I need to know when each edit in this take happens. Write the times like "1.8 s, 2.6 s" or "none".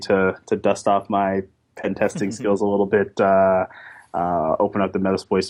none